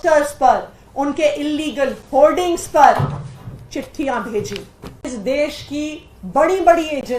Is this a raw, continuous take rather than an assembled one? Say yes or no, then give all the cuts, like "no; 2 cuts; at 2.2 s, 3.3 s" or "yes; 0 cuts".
no; 1 cut; at 5.1 s